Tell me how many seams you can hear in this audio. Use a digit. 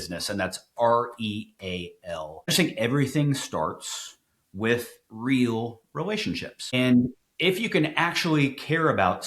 2